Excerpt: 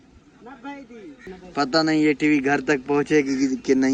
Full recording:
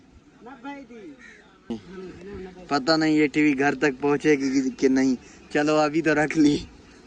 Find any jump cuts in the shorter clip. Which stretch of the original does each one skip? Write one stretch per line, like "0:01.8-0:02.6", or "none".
0:01.3-0:02.4